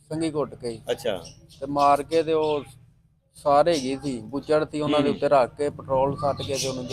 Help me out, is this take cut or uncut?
uncut